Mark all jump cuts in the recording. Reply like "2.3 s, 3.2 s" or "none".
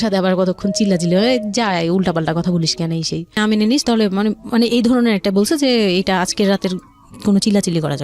3.3 s